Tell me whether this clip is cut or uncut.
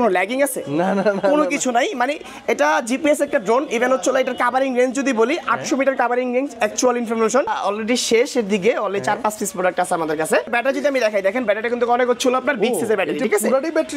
cut